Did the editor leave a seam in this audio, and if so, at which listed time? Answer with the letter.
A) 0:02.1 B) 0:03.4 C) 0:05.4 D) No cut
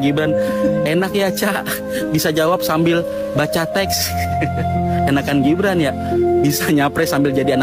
D